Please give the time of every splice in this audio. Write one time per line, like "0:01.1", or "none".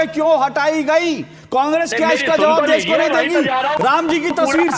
none